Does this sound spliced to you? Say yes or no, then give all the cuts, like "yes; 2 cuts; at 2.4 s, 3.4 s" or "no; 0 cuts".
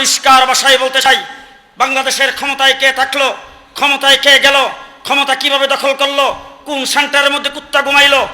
yes; 1 cut; at 1.1 s